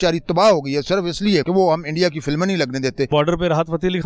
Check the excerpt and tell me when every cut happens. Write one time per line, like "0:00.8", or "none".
0:01.5
0:03.1